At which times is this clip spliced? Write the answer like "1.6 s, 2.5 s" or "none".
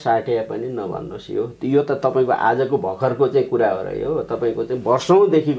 none

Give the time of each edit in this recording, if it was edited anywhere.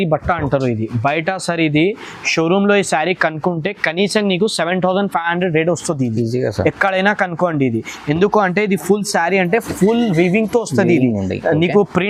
none

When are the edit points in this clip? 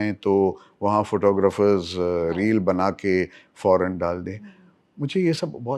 none

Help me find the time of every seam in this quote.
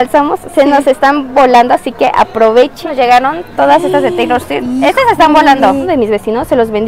2.8 s, 5.9 s

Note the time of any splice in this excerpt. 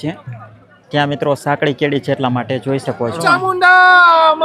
3.2 s

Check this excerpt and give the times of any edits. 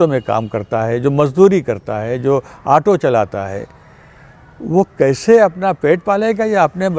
none

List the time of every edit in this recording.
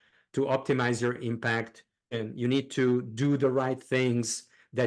2.1 s

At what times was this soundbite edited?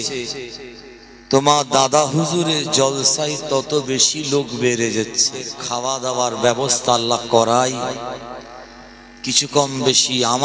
5.6 s

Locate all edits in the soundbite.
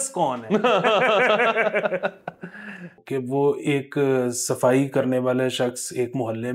3.0 s

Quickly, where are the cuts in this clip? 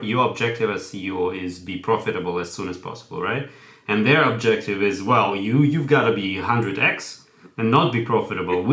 none

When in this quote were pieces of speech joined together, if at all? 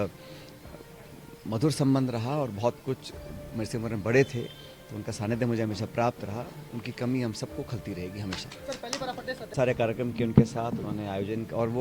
9.5 s

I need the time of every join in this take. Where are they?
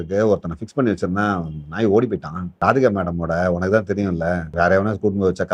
2.5 s, 4.5 s

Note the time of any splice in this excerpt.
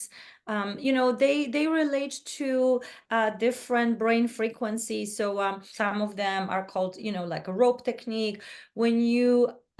5.6 s

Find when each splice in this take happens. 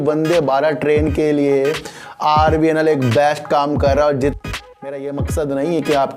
4.4 s

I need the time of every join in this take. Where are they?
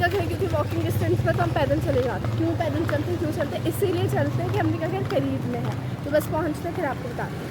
2.3 s

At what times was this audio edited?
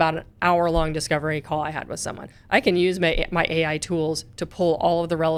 none

